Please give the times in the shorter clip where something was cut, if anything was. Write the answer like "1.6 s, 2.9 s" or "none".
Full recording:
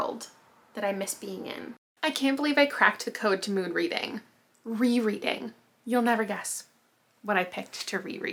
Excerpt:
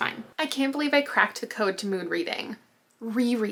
none